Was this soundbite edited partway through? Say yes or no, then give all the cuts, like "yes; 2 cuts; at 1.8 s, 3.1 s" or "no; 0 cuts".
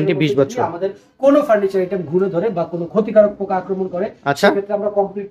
no; 0 cuts